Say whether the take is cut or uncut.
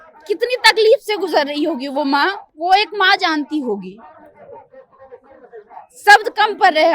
uncut